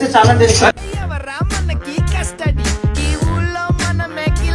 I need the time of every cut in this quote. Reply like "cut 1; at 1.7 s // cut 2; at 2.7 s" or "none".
none